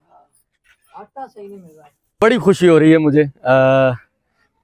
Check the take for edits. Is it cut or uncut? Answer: cut